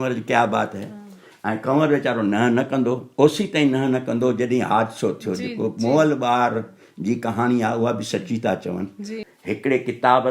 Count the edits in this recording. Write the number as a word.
one